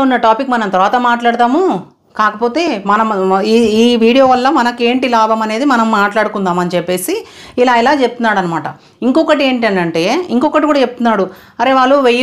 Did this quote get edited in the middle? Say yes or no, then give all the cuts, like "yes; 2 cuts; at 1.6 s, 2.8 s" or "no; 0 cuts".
no; 0 cuts